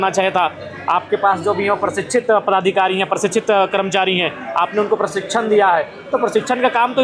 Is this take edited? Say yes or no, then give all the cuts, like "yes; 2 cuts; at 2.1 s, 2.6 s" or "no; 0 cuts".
no; 0 cuts